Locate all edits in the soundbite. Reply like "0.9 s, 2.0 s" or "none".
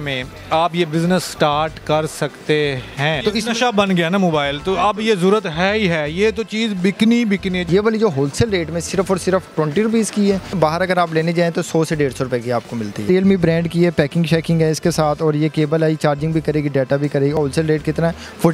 3.2 s, 7.7 s, 10.6 s, 13.1 s, 17.4 s